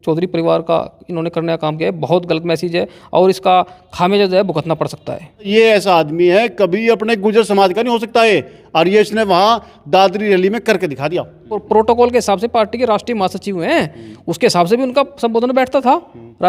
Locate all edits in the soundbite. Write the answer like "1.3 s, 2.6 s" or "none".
5.5 s, 11.5 s